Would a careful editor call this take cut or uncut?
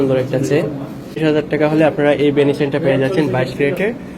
cut